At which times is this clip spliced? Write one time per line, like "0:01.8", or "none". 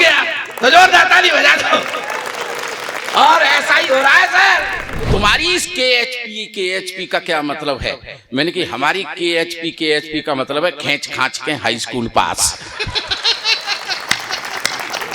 0:05.1